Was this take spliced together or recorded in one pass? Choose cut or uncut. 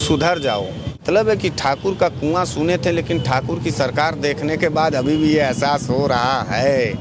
cut